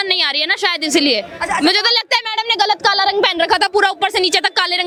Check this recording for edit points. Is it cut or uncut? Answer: uncut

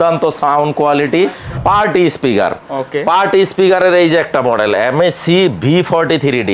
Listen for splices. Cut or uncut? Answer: cut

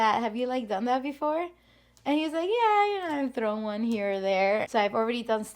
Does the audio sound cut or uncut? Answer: cut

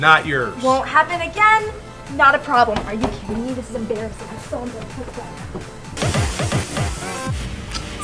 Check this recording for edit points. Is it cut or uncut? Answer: uncut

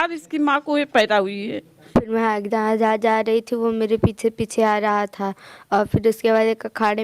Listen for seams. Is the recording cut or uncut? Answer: cut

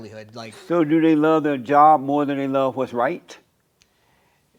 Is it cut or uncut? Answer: uncut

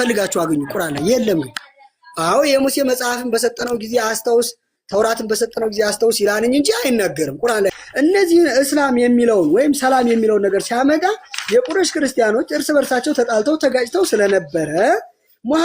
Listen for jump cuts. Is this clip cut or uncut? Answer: cut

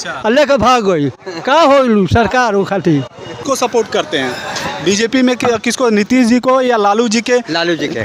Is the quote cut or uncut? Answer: cut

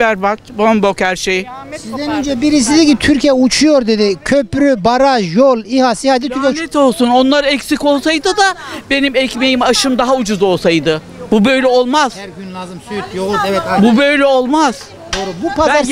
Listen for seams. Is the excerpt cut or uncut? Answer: uncut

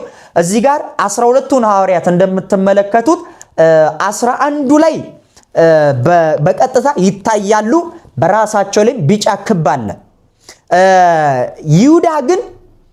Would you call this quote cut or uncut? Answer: uncut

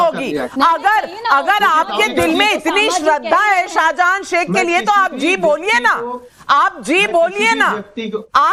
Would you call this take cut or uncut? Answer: uncut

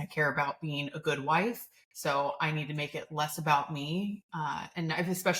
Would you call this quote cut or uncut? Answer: uncut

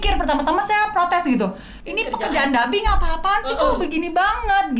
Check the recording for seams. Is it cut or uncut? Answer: cut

